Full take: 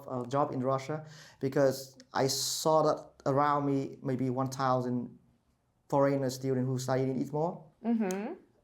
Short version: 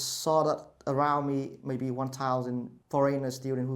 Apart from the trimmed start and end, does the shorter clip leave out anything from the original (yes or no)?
yes